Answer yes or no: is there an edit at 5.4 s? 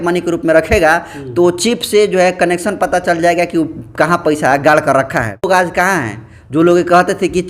yes